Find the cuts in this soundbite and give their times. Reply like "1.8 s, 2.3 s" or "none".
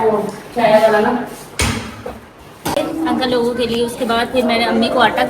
2.8 s